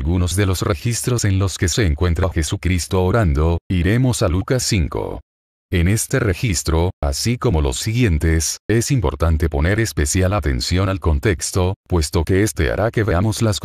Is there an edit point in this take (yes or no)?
no